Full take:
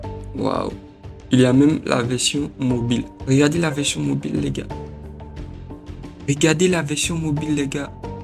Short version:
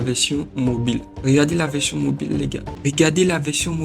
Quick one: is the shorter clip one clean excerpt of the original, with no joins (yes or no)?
no